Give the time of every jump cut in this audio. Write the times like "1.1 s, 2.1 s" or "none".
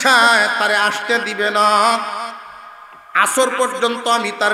none